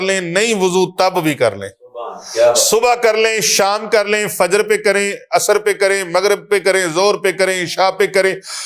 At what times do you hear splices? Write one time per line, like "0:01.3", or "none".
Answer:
none